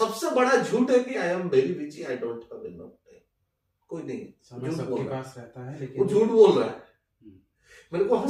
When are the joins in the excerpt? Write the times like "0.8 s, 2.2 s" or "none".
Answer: none

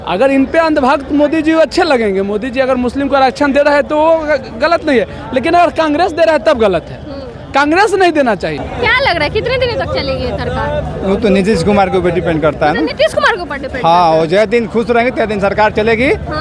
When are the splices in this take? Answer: none

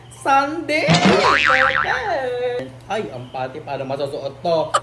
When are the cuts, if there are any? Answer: 2.6 s

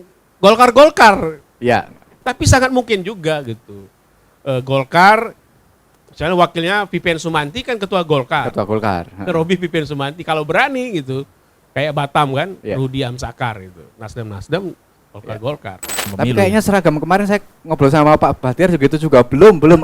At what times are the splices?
16.1 s

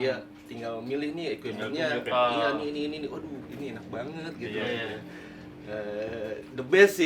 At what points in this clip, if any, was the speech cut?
none

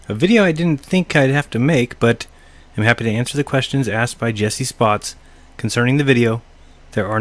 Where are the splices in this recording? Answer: 4.7 s

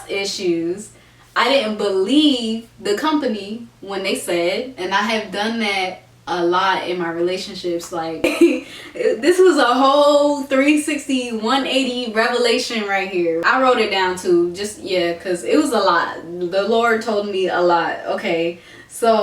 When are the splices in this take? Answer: 4.8 s, 8.2 s, 13.4 s

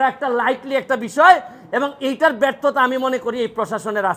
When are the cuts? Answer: none

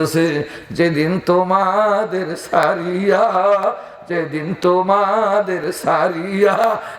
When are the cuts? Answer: none

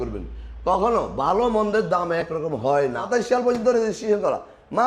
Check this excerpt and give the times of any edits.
3.1 s

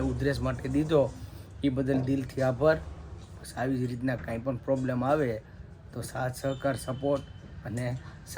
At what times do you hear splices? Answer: none

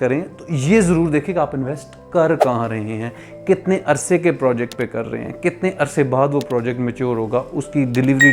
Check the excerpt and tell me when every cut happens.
none

